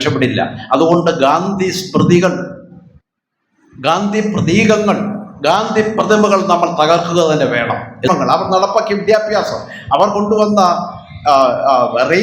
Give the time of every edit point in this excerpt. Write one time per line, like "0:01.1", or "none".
0:08.1